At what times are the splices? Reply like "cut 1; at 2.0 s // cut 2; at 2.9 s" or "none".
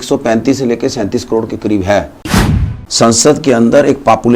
cut 1; at 2.7 s